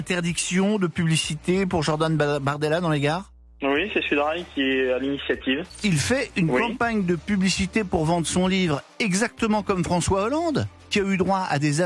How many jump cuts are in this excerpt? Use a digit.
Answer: 1